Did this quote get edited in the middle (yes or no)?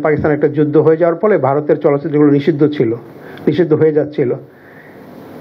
no